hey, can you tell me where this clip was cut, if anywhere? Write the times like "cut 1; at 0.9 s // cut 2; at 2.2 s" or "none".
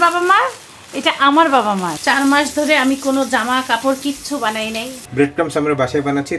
cut 1; at 1.9 s // cut 2; at 5.0 s